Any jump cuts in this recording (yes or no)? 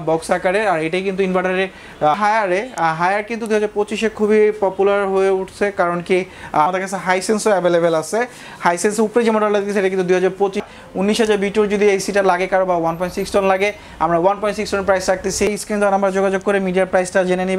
yes